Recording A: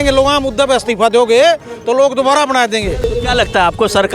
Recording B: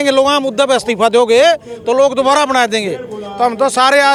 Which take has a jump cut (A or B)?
A